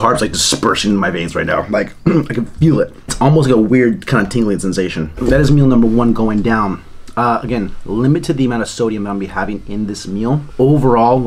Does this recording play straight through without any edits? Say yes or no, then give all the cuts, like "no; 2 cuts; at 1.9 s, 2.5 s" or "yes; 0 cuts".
yes; 0 cuts